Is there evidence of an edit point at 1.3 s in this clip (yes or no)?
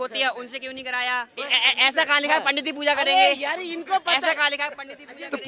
yes